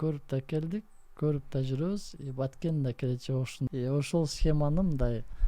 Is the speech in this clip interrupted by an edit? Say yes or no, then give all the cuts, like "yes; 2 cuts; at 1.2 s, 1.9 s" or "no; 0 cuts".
yes; 1 cut; at 3.7 s